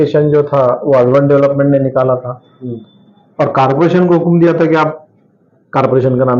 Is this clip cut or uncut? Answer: uncut